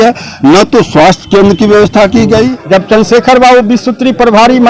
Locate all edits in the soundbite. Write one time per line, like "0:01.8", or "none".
0:02.6